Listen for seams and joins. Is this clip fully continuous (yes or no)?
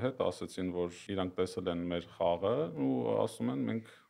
no